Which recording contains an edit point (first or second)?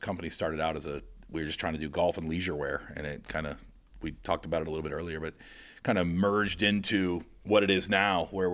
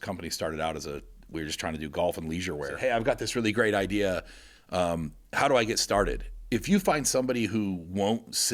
second